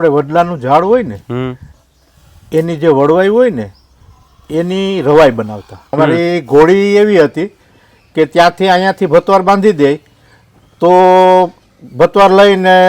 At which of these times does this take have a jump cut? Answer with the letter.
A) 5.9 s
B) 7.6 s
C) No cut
A